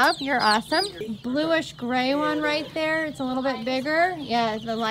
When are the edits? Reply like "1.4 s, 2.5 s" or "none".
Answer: 1.0 s

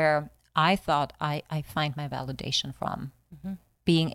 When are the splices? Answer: none

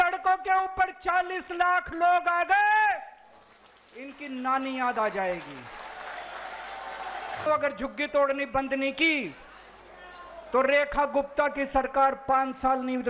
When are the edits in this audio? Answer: 7.5 s

